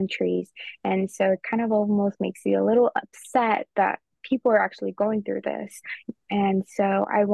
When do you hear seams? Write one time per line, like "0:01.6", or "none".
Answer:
0:06.0